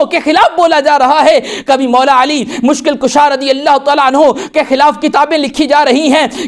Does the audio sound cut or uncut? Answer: uncut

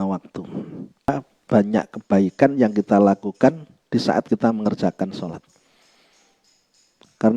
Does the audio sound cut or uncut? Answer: cut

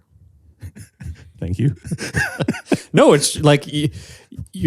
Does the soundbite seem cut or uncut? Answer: uncut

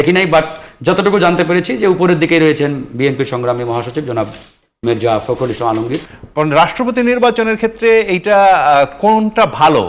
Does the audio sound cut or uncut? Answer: cut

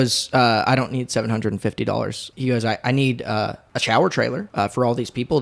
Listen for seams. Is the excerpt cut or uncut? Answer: cut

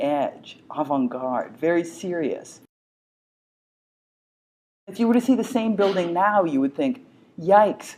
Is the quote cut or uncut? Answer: uncut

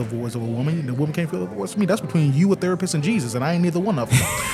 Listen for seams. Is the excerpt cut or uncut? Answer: uncut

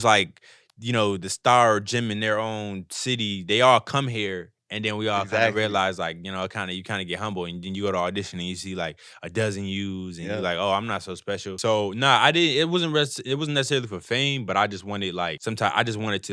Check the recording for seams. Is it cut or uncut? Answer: cut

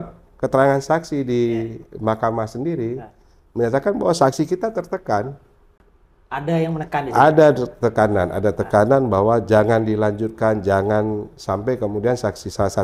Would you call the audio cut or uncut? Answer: uncut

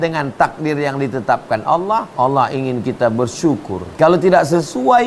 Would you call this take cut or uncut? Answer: cut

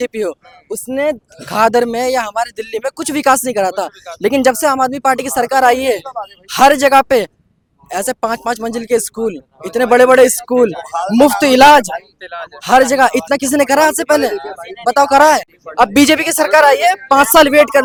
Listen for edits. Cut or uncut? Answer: uncut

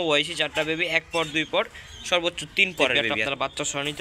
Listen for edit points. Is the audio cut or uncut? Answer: cut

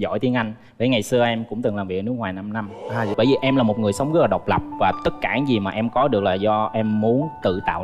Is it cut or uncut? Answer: cut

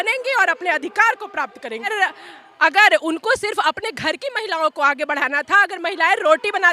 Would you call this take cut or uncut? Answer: cut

